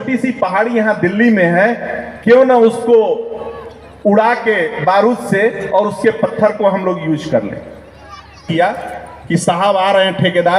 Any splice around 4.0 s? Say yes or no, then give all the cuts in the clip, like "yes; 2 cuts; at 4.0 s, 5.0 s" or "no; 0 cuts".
no; 1 cut; at 8.5 s